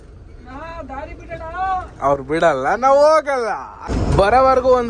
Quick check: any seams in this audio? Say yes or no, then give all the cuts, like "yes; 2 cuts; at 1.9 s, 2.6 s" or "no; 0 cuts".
yes; 1 cut; at 3.9 s